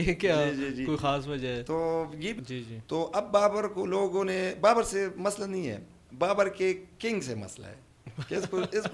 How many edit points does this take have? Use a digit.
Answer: 1